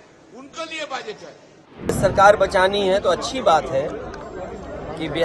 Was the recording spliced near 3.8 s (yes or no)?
no